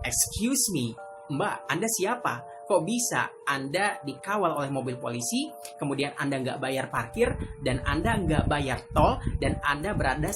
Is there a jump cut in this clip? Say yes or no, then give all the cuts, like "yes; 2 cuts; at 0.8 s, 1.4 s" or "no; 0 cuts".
no; 0 cuts